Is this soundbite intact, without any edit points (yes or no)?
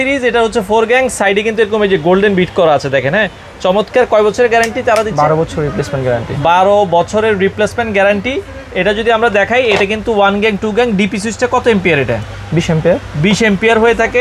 yes